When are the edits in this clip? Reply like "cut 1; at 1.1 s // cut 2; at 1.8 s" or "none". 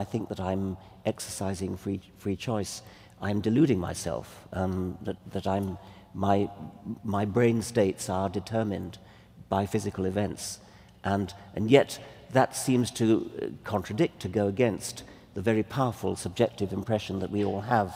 cut 1; at 7.4 s